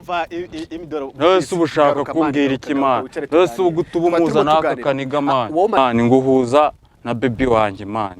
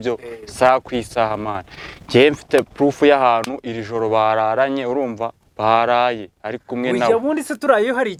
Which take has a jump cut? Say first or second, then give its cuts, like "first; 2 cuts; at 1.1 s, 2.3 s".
first; 1 cut; at 5.8 s